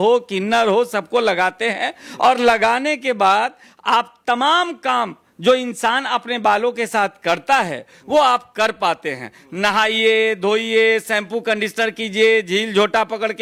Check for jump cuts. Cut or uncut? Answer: uncut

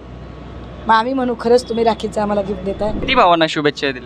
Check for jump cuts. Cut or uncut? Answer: cut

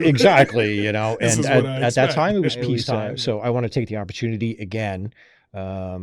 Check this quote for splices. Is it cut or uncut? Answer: cut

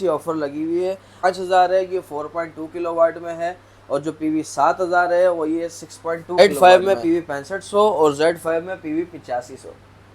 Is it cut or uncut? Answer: cut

